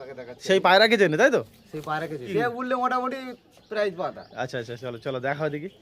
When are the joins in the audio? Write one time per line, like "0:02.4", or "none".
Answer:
0:02.3